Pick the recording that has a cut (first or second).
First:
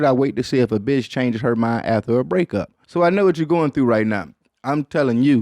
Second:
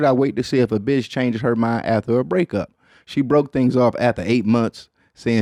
first